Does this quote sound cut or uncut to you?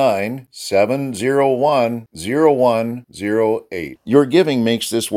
uncut